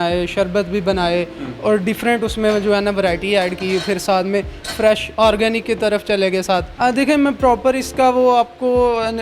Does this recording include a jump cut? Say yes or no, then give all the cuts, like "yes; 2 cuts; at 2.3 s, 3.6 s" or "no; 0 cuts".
yes; 1 cut; at 6.7 s